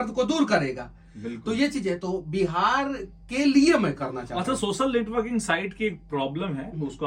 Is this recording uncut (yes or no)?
yes